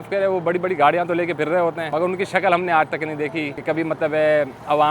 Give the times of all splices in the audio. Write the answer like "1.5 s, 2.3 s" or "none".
none